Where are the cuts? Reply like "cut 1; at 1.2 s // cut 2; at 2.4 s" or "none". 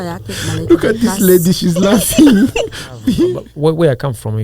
cut 1; at 3.3 s